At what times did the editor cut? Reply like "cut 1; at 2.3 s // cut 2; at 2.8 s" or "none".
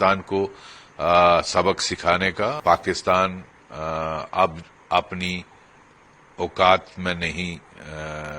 cut 1; at 2.6 s